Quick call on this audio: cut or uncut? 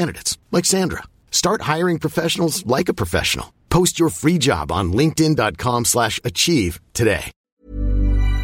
cut